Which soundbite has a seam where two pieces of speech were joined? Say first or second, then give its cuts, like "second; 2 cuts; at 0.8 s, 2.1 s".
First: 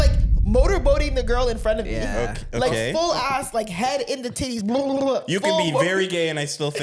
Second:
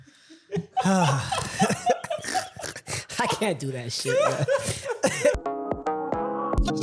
second; 1 cut; at 5.4 s